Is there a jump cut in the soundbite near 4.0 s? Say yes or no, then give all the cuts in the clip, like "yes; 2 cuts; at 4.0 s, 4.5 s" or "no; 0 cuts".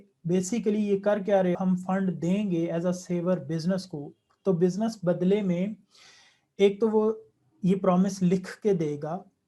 no; 1 cut; at 1.6 s